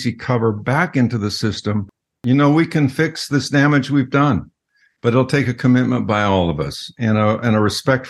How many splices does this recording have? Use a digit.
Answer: 1